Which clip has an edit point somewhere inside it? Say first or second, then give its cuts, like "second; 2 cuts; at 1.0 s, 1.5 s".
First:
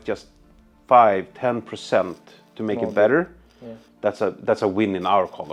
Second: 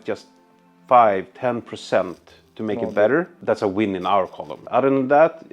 second; 2 cuts; at 3.4 s, 4.6 s